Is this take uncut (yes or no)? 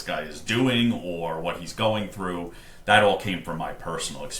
yes